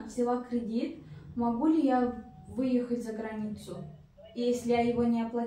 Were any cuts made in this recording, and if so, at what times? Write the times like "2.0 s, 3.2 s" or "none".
none